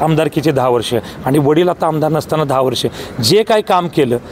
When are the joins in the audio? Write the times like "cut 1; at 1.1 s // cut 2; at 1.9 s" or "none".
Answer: none